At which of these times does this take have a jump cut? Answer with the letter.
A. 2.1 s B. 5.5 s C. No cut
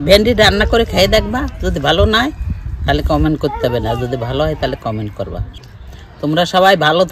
B